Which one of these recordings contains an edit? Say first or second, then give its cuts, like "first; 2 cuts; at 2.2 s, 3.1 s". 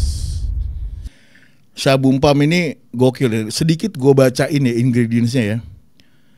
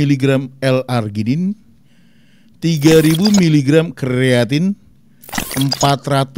first; 1 cut; at 1.1 s